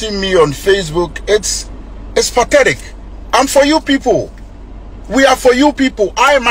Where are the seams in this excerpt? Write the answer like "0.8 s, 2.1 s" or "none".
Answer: none